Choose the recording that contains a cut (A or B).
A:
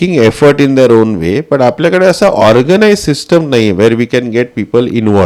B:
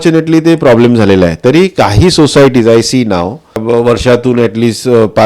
B